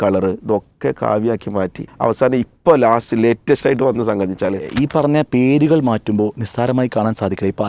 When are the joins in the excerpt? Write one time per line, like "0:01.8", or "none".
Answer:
0:01.8
0:04.7